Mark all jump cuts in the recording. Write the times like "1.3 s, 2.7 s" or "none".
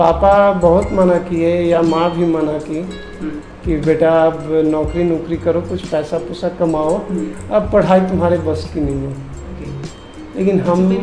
none